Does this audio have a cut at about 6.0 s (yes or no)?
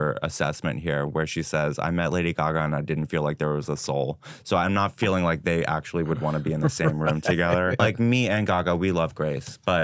no